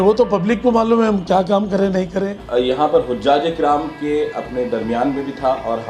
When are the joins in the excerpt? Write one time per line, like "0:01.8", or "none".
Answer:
0:02.3